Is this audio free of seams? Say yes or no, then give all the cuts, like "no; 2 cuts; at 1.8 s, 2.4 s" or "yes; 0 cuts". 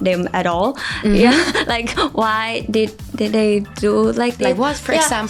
yes; 0 cuts